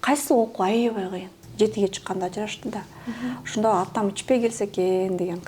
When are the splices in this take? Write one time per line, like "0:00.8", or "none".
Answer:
0:01.4